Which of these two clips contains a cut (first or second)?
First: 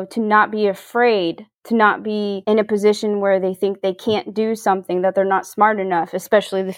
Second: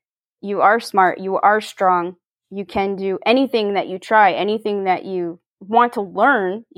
first